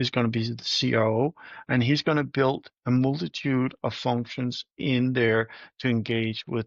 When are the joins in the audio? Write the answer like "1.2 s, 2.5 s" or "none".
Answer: none

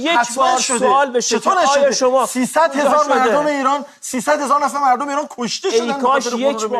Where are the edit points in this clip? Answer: none

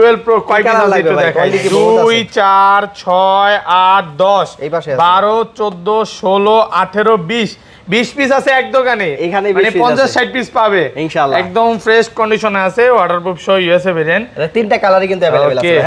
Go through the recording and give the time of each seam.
none

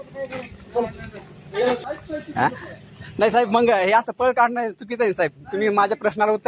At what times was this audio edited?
1.8 s

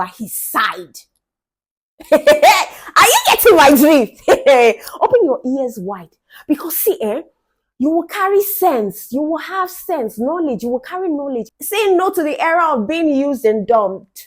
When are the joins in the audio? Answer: 11.4 s

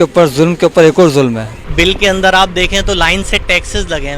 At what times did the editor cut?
1.5 s

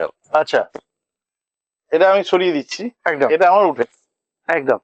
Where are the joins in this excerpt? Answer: none

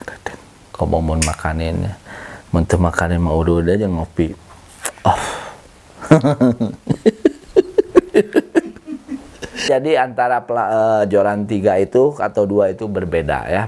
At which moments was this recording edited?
9.7 s

